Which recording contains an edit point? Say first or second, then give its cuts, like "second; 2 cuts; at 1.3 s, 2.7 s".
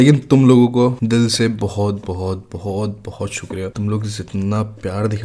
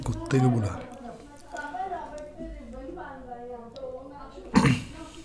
first; 2 cuts; at 1.0 s, 3.7 s